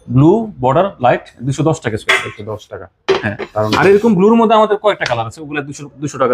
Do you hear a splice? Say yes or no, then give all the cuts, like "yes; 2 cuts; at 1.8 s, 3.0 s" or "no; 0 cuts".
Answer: no; 0 cuts